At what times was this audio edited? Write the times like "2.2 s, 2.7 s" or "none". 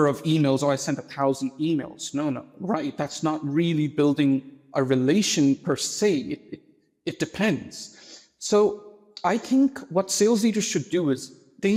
none